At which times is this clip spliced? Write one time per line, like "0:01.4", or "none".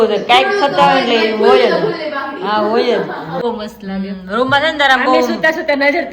0:03.4